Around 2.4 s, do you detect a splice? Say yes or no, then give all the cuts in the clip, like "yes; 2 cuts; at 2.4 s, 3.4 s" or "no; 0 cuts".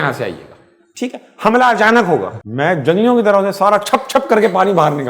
yes; 1 cut; at 2.4 s